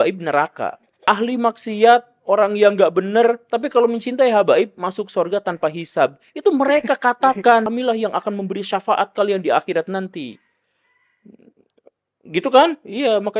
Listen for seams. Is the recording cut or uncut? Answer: cut